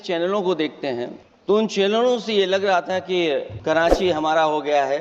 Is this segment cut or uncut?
cut